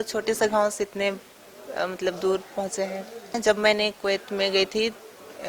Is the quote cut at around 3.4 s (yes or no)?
yes